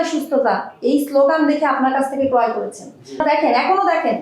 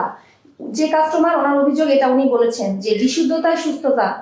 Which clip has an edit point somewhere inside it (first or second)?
first